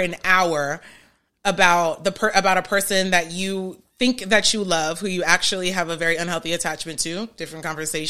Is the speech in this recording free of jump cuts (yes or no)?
yes